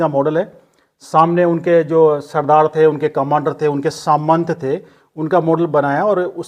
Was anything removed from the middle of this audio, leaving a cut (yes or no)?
no